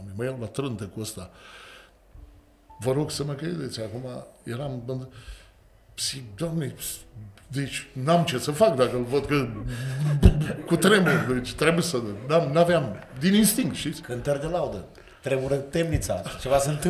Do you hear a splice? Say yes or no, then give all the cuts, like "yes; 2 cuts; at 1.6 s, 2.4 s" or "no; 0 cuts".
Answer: no; 0 cuts